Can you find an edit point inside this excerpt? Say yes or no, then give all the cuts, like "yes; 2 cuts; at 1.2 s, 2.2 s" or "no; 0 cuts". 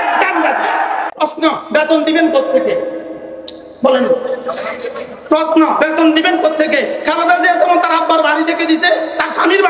yes; 1 cut; at 1.1 s